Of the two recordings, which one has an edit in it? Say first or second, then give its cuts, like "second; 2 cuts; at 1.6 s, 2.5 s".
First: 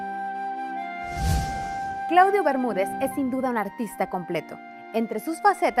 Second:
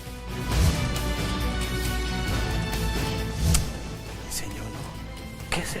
first; 1 cut; at 4.2 s